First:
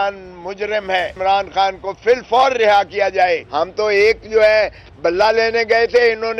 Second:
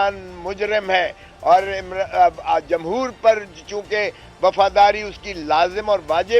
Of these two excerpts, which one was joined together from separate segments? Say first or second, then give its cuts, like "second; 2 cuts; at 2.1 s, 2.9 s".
first; 2 cuts; at 1.2 s, 3.5 s